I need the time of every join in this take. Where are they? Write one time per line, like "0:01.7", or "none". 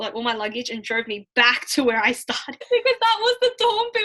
0:02.5